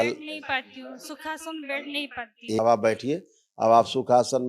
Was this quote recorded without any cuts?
no; 1 cut; at 2.6 s

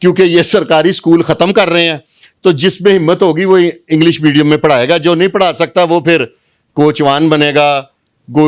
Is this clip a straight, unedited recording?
yes; 0 cuts

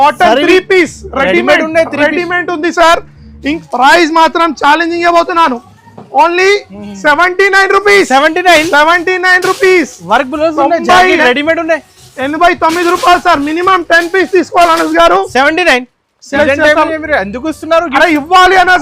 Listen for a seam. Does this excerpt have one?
yes; 2 cuts; at 3.4 s, 16.3 s

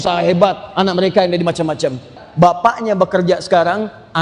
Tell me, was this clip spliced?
yes; 1 cut; at 2.2 s

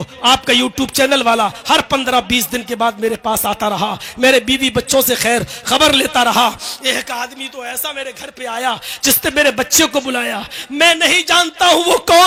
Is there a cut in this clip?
no; 0 cuts

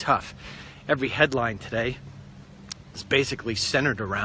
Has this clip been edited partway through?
no; 0 cuts

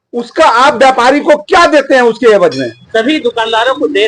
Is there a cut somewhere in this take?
yes; 1 cut; at 2.7 s

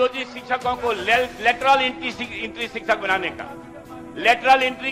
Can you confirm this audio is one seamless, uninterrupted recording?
yes; 0 cuts

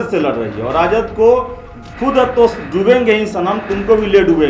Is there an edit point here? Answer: no; 0 cuts

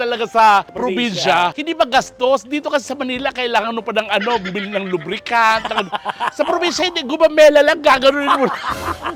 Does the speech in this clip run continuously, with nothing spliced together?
yes; 0 cuts

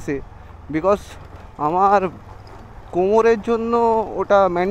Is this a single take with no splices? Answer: yes; 0 cuts

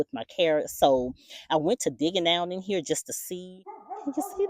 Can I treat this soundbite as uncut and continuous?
no; 1 cut; at 3.5 s

